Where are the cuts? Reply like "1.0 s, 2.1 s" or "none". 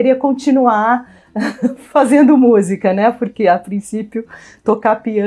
none